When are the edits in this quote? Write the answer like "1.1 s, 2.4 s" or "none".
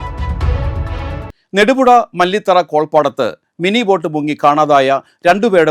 1.3 s